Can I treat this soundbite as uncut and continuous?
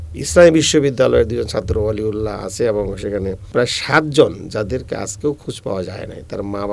no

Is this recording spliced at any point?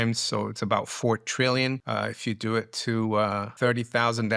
yes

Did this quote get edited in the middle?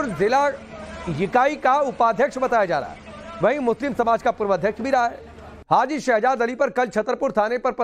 yes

